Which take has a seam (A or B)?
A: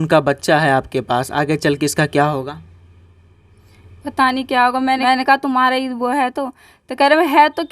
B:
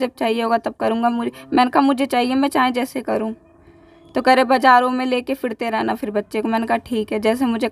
A